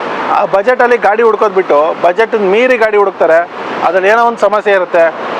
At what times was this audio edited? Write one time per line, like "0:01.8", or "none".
none